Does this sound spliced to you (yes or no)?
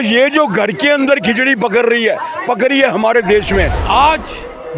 yes